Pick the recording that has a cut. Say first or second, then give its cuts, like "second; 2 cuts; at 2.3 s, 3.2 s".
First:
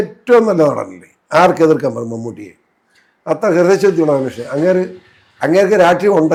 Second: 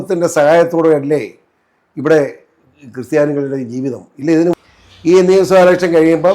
second; 1 cut; at 4.5 s